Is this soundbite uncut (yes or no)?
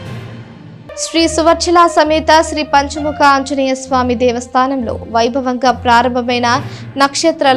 no